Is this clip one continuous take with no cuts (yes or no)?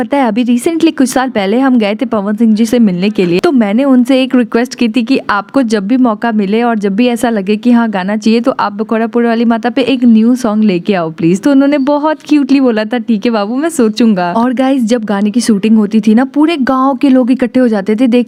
yes